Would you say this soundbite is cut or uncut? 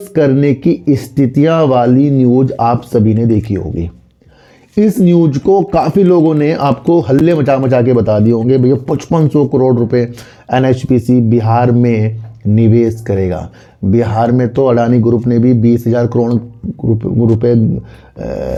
uncut